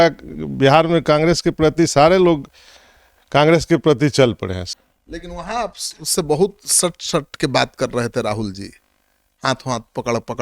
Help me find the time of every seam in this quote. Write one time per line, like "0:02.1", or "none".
0:04.5